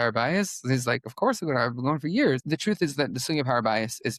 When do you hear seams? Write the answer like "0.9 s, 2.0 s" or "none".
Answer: 2.4 s